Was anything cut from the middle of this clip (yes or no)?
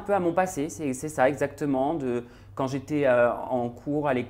no